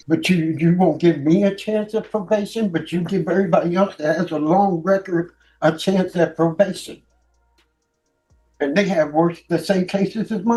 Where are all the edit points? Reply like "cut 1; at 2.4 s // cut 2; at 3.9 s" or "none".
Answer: none